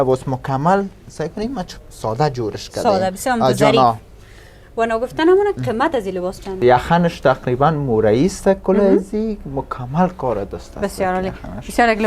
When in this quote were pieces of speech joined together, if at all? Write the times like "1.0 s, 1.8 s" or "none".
6.6 s